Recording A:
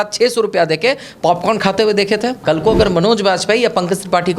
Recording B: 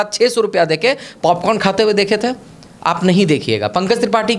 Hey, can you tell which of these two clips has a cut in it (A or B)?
A